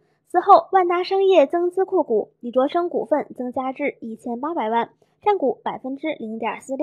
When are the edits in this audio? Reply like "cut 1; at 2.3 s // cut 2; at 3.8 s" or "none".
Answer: cut 1; at 2.4 s